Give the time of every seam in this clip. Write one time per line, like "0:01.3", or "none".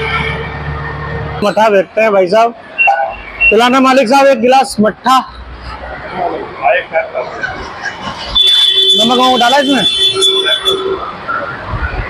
0:01.4

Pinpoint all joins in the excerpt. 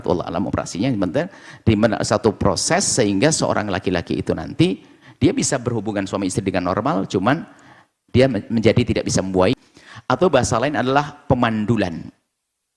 0:09.6

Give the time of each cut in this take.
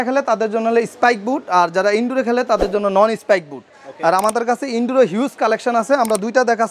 none

